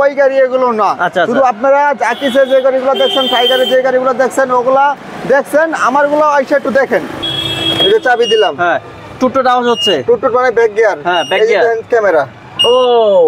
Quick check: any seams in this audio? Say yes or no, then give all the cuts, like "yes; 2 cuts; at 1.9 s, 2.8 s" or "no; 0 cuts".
yes; 1 cut; at 7.2 s